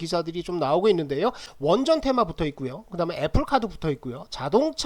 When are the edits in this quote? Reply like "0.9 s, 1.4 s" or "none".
1.5 s